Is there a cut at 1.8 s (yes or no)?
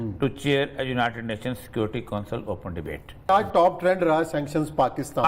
no